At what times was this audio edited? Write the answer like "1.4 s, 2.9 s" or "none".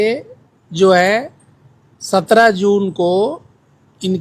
none